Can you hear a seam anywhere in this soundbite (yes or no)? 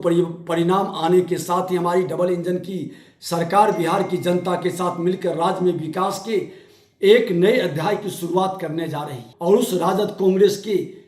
yes